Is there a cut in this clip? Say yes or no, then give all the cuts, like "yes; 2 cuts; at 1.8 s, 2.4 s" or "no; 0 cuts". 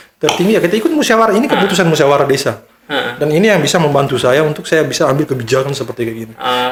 no; 0 cuts